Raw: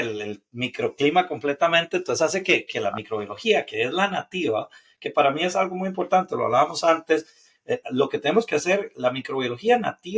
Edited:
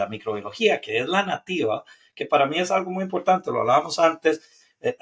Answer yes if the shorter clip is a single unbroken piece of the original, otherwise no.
yes